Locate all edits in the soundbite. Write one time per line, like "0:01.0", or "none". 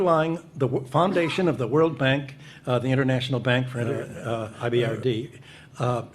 0:04.5